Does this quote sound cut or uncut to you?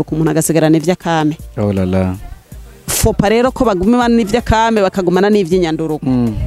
uncut